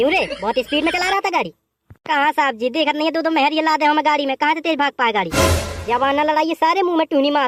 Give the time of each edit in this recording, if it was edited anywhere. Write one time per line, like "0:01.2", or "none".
none